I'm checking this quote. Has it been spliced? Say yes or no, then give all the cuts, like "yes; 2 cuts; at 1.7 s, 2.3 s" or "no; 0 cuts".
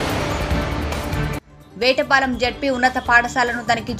no; 0 cuts